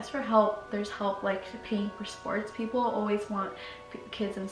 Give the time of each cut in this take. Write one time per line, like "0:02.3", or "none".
none